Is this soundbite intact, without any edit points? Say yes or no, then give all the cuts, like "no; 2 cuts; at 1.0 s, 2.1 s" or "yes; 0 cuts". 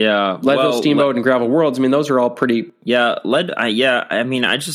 no; 1 cut; at 2.7 s